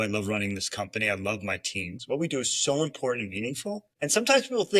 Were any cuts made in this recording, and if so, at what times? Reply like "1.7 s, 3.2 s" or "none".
1.9 s, 3.9 s